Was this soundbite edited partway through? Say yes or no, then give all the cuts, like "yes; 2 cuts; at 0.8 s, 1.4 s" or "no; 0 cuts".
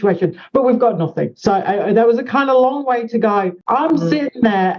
yes; 1 cut; at 3.6 s